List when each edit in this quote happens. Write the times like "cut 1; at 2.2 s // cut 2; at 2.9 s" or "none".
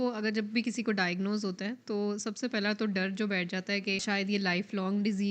cut 1; at 4.0 s